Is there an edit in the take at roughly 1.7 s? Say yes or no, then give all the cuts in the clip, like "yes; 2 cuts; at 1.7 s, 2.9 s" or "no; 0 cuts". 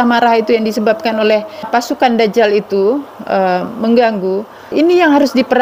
yes; 2 cuts; at 1.7 s, 4.7 s